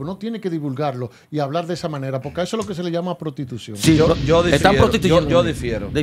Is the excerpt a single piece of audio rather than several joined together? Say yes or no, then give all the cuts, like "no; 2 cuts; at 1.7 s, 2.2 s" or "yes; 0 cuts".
yes; 0 cuts